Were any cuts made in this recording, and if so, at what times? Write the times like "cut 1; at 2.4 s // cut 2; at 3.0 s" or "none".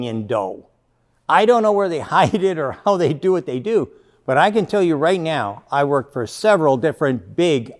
cut 1; at 1.0 s